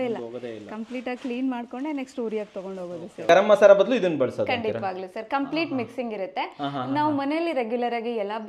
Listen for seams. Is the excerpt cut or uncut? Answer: cut